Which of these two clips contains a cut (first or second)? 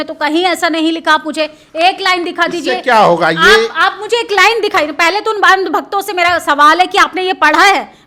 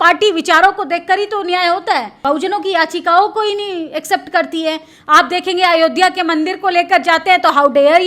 second